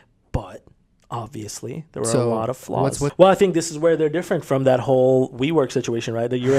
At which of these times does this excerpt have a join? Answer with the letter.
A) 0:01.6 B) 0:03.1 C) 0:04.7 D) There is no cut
B